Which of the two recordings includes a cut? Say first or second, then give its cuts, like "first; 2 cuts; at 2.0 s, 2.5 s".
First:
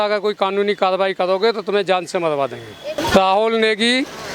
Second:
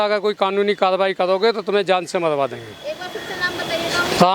first; 1 cut; at 2.9 s